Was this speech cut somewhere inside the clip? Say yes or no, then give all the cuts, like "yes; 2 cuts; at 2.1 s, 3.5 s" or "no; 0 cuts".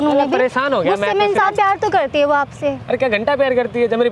yes; 1 cut; at 1.4 s